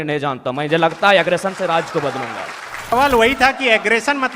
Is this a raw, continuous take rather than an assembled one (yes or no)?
no